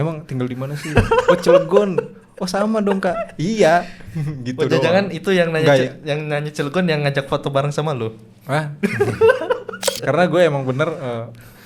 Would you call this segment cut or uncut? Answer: cut